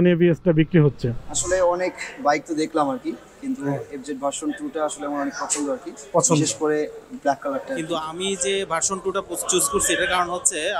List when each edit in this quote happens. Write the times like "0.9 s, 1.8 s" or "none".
1.3 s, 7.9 s

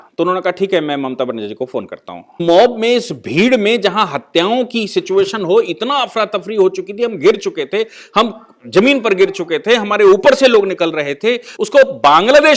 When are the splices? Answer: 2.4 s, 11.5 s

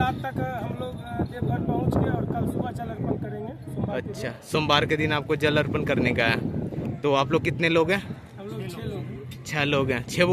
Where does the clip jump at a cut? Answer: none

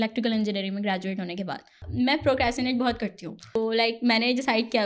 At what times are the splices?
1.8 s, 3.6 s

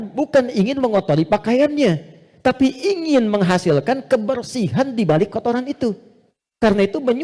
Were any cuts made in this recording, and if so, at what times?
none

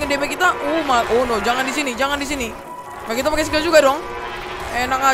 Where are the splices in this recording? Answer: 3.0 s

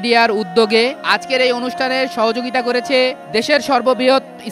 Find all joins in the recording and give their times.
1.0 s

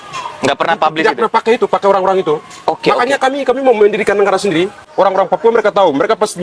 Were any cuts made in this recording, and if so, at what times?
4.9 s

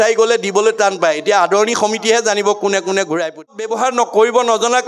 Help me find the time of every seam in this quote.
3.6 s

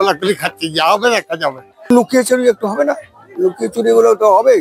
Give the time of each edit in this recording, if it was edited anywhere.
1.7 s

